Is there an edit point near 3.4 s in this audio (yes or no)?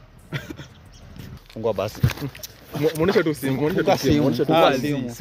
no